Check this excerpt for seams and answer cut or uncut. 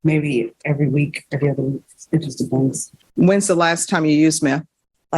cut